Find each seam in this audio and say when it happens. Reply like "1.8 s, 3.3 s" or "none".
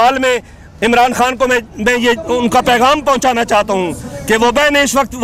none